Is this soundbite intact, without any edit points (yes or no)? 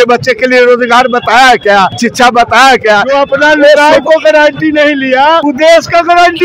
no